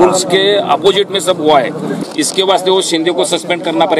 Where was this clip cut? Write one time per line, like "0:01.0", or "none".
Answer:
0:01.9